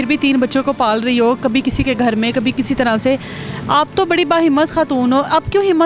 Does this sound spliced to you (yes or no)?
no